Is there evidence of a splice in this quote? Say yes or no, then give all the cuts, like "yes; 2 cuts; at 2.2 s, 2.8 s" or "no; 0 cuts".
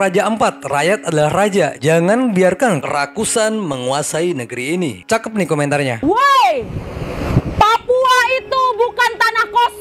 no; 0 cuts